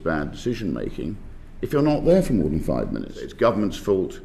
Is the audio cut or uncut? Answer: cut